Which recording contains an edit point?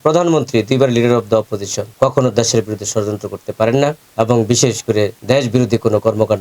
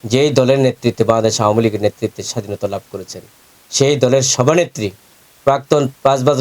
first; 3 cuts; at 1.8 s, 4.0 s, 5.2 s

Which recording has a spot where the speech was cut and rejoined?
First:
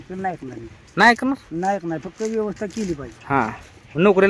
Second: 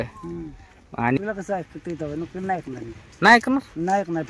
second; 1 cut; at 1.2 s

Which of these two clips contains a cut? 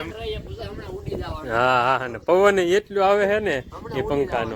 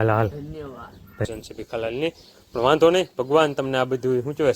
second; 1 cut; at 1.2 s

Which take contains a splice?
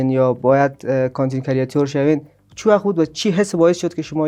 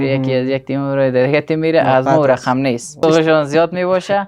second; 1 cut; at 3.0 s

